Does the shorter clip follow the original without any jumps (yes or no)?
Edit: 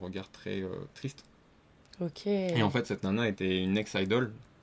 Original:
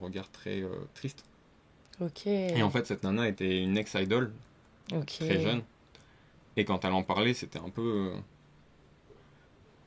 yes